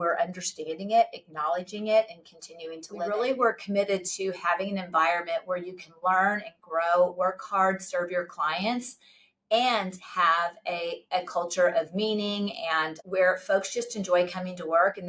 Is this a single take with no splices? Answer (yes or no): no